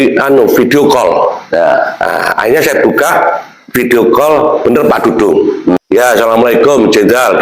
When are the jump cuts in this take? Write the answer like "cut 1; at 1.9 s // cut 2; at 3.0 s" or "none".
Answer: cut 1; at 5.8 s